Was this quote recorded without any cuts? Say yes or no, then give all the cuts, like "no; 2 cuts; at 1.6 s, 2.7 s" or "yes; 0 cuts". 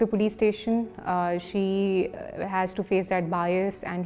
yes; 0 cuts